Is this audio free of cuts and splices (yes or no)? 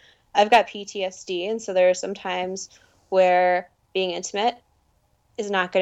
yes